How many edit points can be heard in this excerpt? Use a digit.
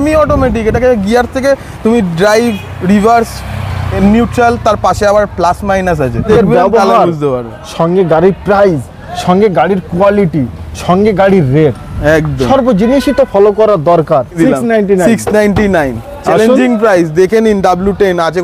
2